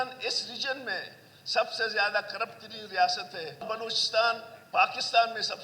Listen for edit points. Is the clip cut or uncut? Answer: cut